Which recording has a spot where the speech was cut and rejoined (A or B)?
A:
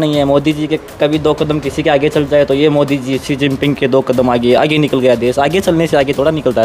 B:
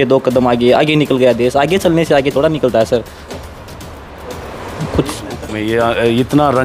B